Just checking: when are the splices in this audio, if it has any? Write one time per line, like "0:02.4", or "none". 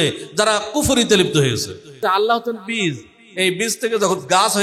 0:02.0